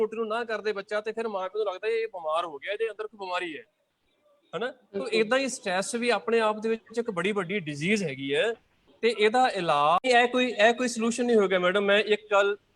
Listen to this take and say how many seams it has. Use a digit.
1